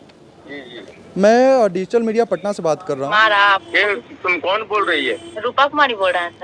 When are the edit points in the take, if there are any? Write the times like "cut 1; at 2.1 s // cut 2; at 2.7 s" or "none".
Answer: cut 1; at 3.1 s